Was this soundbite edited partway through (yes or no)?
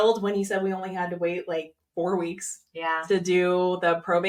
no